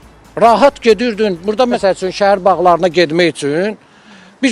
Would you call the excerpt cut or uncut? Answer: cut